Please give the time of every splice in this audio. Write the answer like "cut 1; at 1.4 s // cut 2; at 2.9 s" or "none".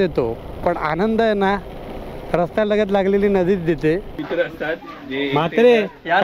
cut 1; at 4.2 s